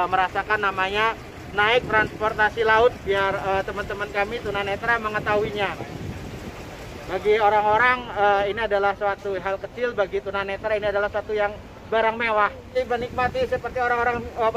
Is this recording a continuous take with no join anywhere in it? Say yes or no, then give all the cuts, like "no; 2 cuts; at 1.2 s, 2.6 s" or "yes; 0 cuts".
no; 1 cut; at 12.8 s